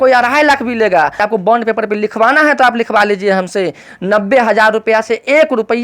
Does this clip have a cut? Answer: yes; 1 cut; at 1.2 s

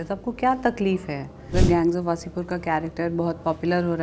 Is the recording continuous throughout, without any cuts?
no; 1 cut; at 1.5 s

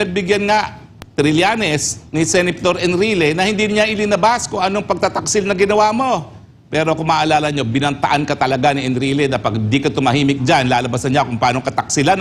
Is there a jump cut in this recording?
no; 0 cuts

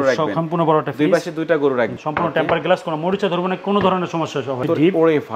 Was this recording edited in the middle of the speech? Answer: yes; 2 cuts; at 1.9 s, 4.6 s

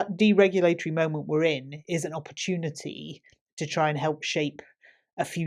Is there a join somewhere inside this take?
no; 0 cuts

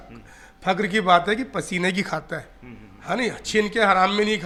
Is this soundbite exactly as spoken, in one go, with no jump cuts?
yes; 0 cuts

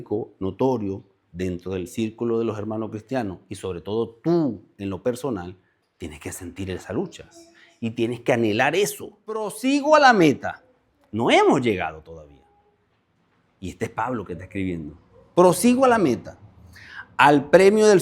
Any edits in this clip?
yes; 1 cut; at 9.6 s

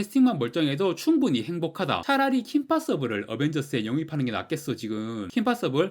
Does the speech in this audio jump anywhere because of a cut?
yes; 1 cut; at 2.0 s

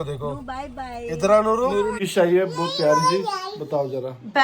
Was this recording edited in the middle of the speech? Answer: yes; 1 cut; at 2.0 s

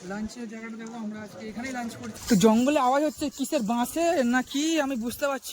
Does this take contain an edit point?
yes; 1 cut; at 2.2 s

